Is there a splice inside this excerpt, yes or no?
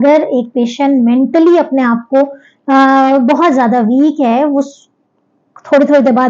no